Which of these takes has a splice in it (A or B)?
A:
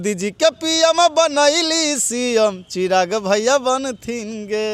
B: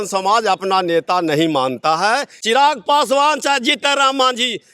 B